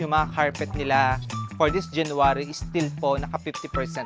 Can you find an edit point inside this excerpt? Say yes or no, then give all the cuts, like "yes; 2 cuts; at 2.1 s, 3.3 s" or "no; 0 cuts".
no; 0 cuts